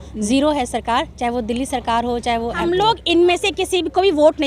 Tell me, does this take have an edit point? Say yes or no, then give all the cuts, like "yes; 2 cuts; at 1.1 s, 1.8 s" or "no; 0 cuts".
yes; 1 cut; at 2.6 s